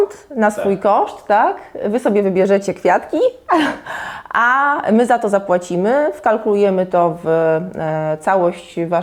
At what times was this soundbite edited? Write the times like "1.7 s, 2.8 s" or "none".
none